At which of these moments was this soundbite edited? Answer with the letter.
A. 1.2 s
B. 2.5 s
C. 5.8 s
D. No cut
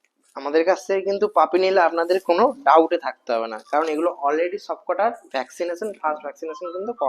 D